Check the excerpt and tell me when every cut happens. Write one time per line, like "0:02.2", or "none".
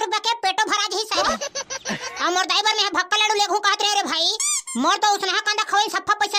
none